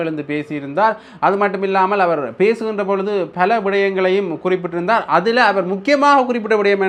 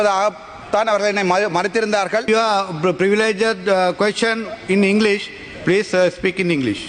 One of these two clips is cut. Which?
second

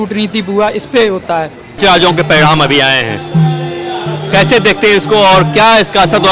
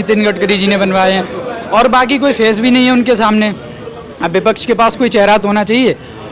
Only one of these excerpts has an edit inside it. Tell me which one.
first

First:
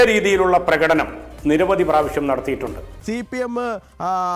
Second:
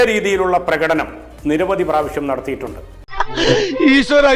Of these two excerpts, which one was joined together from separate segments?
first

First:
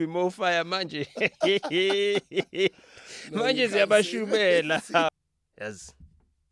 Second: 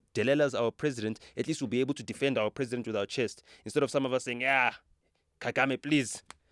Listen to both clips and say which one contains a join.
first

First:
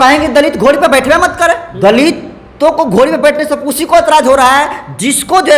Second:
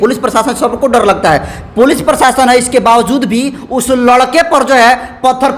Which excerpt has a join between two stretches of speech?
first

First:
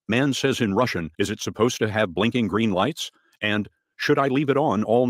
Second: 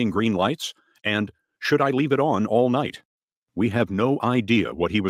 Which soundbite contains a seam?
first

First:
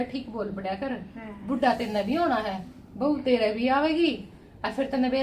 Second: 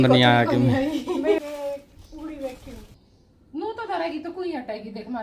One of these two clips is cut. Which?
second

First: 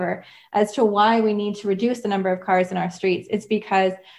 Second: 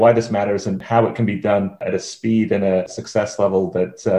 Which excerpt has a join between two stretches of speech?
second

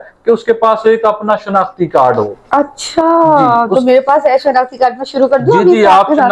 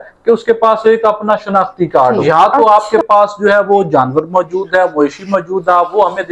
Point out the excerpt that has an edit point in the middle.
second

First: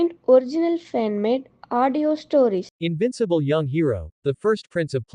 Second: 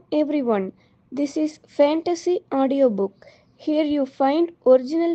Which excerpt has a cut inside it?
first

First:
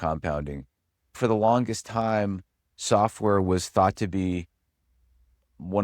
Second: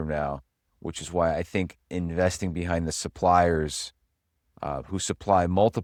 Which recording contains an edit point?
first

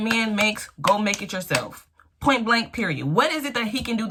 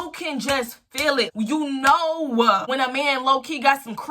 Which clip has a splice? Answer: second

